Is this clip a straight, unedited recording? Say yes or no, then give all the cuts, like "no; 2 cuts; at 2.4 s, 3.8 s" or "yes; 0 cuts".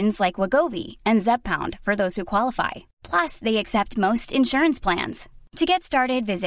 yes; 0 cuts